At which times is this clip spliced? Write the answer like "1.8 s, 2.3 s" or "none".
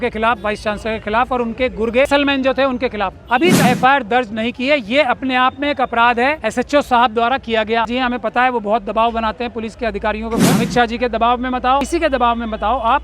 2.1 s, 3.6 s, 6.4 s, 7.9 s, 10.6 s, 11.9 s